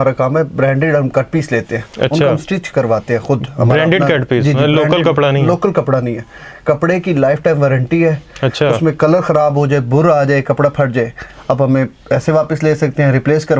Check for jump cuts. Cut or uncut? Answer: uncut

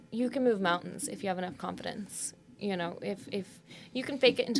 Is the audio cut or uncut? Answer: uncut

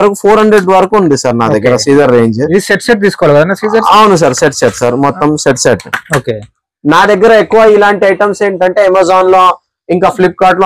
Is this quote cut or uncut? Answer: uncut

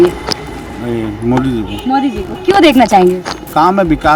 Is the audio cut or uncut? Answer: uncut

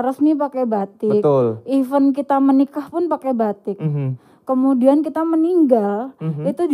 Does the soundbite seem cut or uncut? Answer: uncut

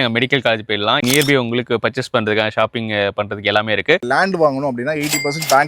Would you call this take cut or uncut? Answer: cut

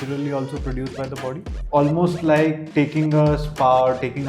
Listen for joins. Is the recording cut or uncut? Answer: cut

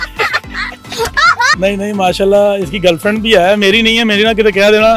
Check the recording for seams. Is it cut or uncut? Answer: cut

